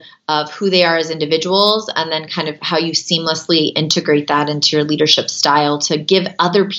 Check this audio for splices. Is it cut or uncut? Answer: uncut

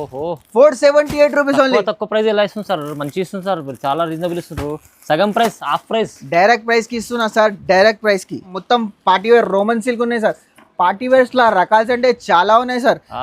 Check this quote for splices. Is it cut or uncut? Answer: cut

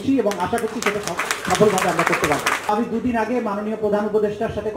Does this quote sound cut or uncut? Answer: cut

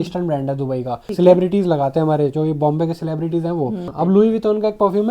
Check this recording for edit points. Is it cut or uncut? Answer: cut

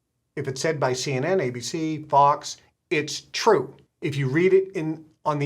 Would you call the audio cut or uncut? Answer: cut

